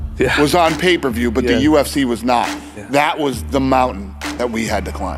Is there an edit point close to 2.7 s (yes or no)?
no